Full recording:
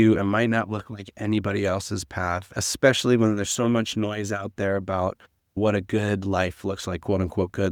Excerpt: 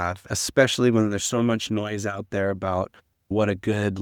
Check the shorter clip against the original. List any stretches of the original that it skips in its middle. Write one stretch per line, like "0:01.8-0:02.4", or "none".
none